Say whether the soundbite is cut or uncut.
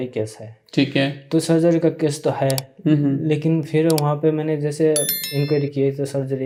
uncut